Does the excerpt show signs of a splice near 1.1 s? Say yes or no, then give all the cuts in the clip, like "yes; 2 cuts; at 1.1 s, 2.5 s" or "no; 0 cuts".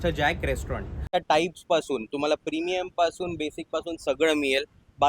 yes; 1 cut; at 1.1 s